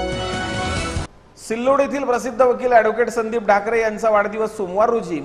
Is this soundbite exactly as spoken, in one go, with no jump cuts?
no; 1 cut; at 1.1 s

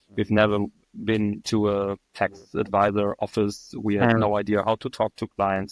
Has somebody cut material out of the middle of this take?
no; 0 cuts

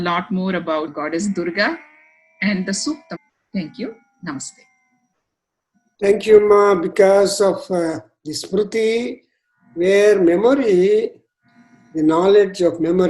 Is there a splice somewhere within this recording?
yes; 2 cuts; at 0.9 s, 3.2 s

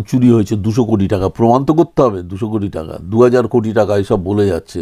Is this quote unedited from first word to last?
yes; 0 cuts

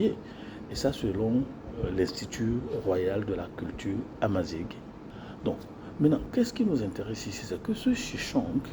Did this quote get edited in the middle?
yes; 1 cut; at 5.0 s

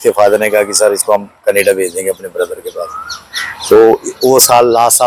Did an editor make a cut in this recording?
no; 0 cuts

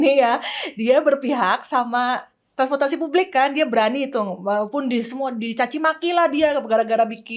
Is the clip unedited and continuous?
yes; 0 cuts

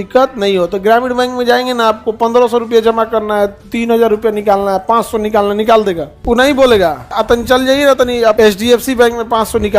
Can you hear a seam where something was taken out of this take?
yes; 3 cuts; at 6.1 s, 7.1 s, 8.4 s

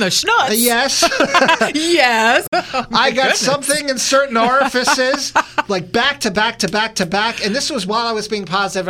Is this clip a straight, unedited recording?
yes; 0 cuts

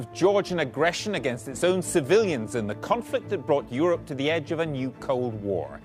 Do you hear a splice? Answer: no; 0 cuts

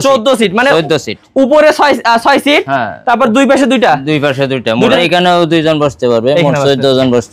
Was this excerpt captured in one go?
no; 1 cut; at 5.0 s

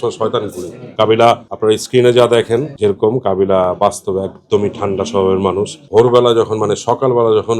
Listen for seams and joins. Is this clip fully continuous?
no; 1 cut; at 5.8 s

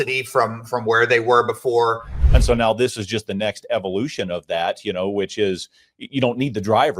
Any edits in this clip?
yes; 1 cut; at 2.2 s

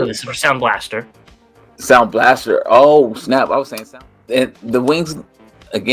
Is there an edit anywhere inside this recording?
yes; 1 cut; at 3.7 s

